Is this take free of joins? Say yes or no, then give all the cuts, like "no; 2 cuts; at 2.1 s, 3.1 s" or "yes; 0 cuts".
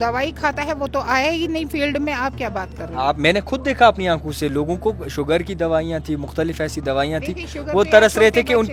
yes; 0 cuts